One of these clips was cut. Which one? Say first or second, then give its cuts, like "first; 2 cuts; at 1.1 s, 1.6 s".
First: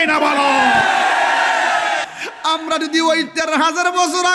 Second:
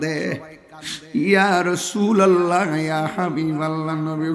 first; 1 cut; at 2.1 s